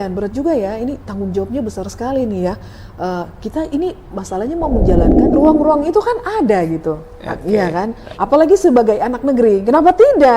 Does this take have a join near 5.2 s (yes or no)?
yes